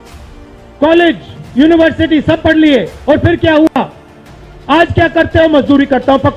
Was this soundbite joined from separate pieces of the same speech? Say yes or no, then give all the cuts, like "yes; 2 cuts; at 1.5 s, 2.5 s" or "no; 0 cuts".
no; 0 cuts